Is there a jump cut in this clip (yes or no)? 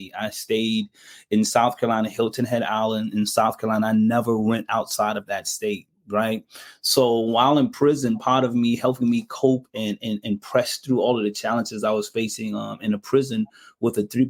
no